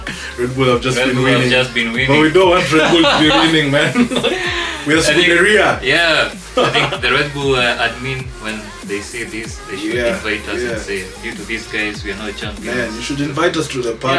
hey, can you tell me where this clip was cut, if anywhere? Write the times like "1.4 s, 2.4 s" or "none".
none